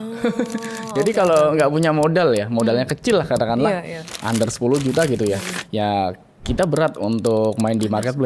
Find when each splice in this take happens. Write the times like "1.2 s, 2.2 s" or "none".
none